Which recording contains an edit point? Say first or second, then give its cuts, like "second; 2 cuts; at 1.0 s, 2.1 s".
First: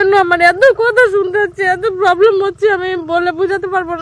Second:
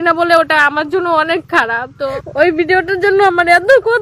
second; 1 cut; at 2.2 s